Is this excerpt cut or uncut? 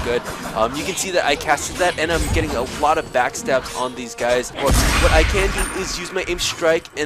cut